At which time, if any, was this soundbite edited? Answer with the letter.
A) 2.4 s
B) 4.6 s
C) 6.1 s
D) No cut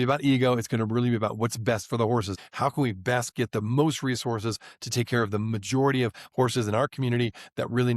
A